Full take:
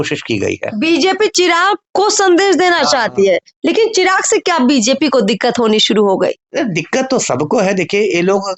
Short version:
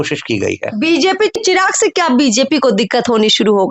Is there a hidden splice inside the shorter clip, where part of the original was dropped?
yes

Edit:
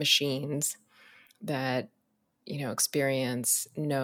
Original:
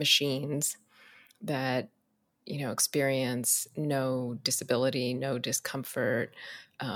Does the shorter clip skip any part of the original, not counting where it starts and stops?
no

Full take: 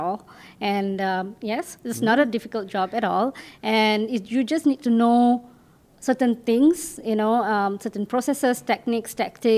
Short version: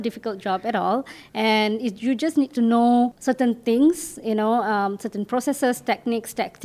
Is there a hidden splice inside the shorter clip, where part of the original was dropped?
yes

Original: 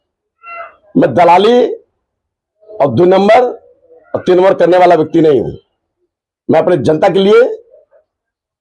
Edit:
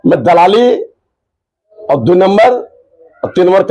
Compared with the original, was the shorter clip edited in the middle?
no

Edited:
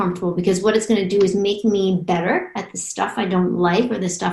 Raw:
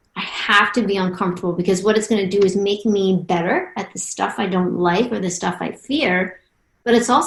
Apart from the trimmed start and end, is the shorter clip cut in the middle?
no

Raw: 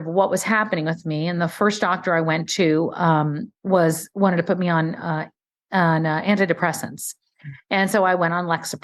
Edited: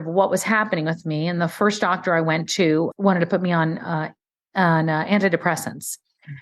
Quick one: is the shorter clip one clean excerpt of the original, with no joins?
no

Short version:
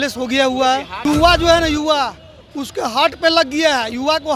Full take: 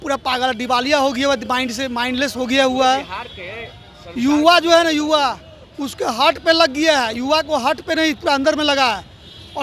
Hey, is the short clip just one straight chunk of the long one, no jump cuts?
no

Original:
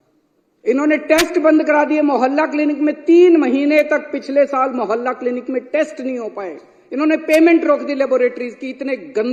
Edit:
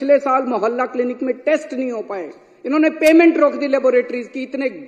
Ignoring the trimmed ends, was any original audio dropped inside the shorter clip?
no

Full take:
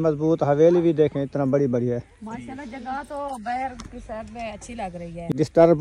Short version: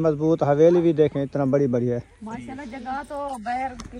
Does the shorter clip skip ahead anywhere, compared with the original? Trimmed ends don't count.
no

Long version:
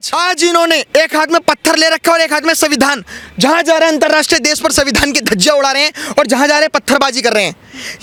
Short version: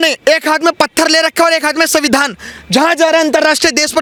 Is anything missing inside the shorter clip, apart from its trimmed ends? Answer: no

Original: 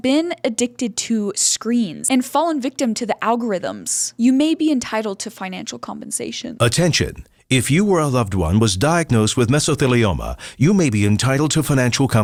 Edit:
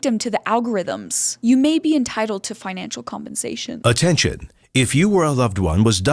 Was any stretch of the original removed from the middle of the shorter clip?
no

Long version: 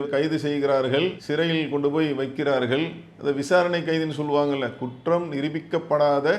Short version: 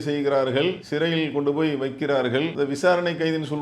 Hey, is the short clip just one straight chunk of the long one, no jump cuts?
no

